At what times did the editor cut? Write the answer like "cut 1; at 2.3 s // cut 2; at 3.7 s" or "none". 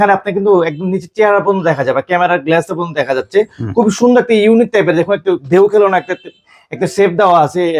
none